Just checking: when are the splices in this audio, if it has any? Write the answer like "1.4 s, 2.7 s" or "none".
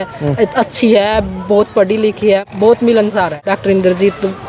none